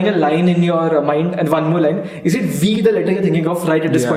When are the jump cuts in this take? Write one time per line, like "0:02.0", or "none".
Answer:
none